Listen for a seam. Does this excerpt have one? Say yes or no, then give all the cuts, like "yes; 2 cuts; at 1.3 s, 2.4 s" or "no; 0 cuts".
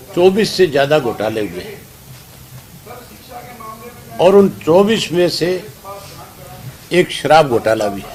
no; 0 cuts